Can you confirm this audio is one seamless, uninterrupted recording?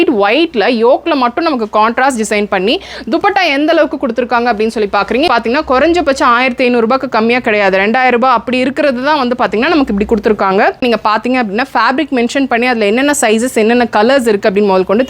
no; 2 cuts; at 5.3 s, 10.8 s

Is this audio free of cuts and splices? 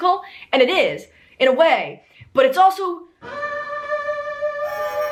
yes; 0 cuts

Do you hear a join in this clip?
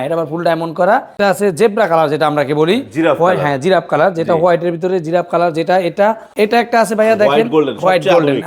yes; 2 cuts; at 1.2 s, 6.3 s

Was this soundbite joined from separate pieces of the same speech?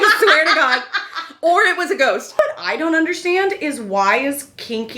yes; 1 cut; at 2.3 s

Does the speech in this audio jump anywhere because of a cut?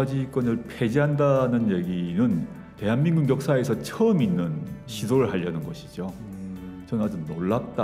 no; 0 cuts

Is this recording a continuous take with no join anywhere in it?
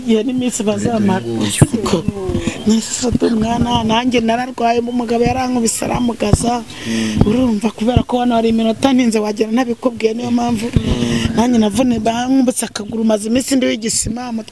yes; 0 cuts

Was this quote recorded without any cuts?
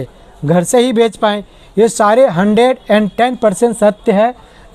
yes; 0 cuts

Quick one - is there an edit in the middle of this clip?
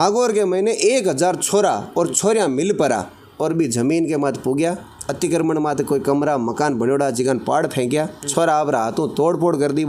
no; 0 cuts

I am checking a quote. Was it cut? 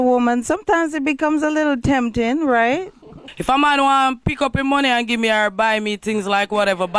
no; 0 cuts

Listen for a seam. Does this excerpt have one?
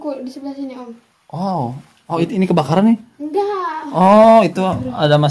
no; 0 cuts

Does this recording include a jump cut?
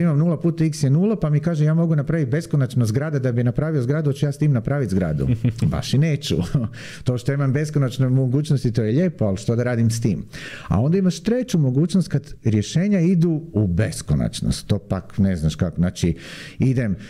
no; 0 cuts

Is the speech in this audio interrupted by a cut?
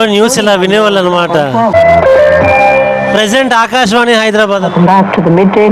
no; 0 cuts

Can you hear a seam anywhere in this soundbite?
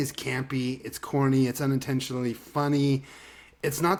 no; 0 cuts

